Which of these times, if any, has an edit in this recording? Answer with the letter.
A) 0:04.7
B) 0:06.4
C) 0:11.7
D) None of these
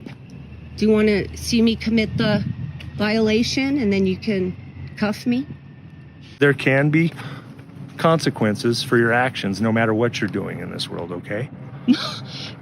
B